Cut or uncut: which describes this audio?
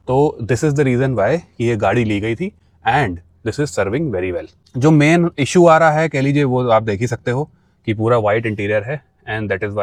uncut